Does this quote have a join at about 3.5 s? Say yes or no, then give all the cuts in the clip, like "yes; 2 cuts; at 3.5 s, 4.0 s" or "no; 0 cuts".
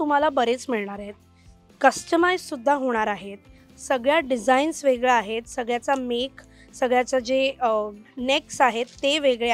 no; 0 cuts